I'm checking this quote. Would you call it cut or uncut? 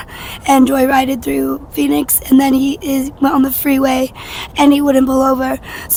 uncut